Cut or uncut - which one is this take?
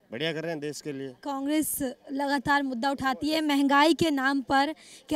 uncut